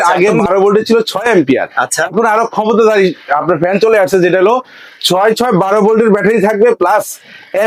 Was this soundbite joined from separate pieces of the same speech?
no; 0 cuts

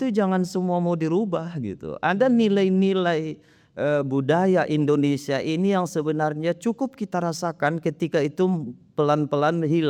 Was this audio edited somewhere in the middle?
no; 0 cuts

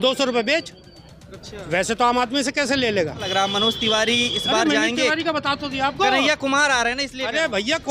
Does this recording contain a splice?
yes; 1 cut; at 3.3 s

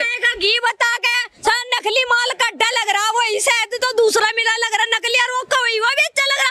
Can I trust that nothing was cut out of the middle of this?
yes; 0 cuts

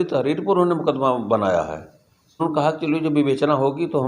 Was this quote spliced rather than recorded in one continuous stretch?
yes; 1 cut; at 2.4 s

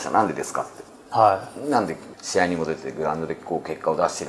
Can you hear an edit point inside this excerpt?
no; 0 cuts

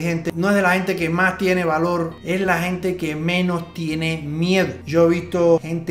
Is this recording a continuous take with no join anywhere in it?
yes; 0 cuts

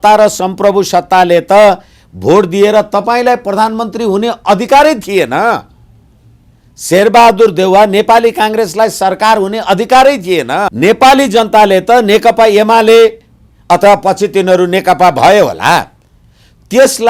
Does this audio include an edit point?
yes; 1 cut; at 10.7 s

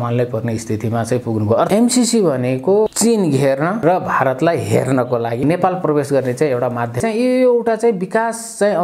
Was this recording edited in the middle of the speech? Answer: yes; 5 cuts; at 1.7 s, 2.9 s, 3.8 s, 5.4 s, 7.0 s

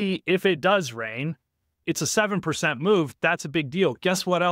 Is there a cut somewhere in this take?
yes; 1 cut; at 1.8 s

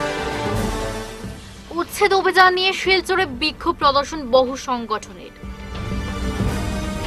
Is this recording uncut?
no; 1 cut; at 1.1 s

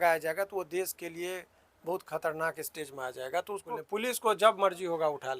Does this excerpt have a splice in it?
yes; 1 cut; at 3.7 s

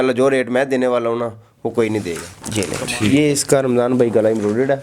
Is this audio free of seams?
no; 1 cut; at 2.3 s

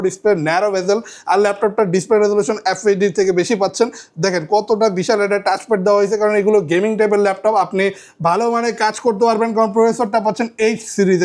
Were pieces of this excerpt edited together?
no; 0 cuts

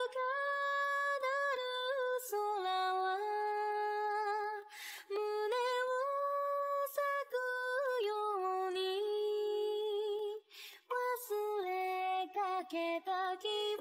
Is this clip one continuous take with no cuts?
yes; 0 cuts

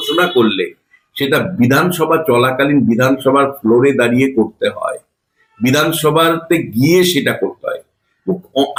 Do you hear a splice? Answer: no; 0 cuts

